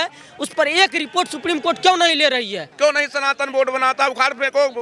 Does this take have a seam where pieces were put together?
yes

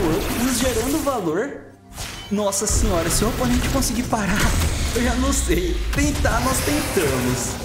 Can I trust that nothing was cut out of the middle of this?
yes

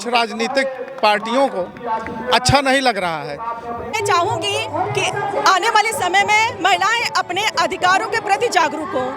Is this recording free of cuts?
no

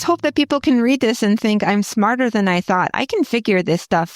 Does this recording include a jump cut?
no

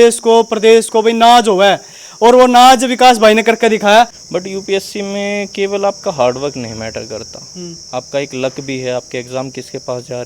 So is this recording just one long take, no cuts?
no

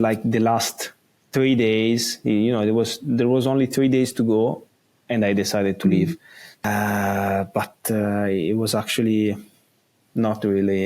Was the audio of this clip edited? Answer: yes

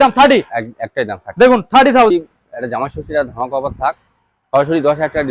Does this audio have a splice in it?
yes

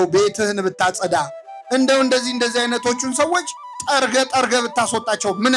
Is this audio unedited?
yes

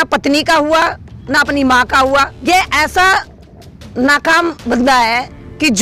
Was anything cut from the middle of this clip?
yes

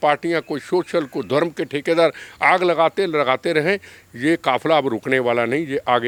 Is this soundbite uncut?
yes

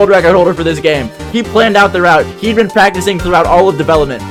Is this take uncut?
yes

